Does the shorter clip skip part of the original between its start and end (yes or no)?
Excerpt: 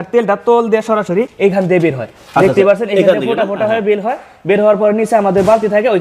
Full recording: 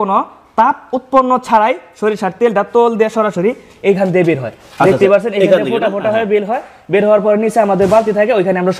yes